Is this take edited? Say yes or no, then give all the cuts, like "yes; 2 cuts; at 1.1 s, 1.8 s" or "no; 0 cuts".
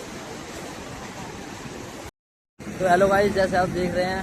yes; 1 cut; at 2.1 s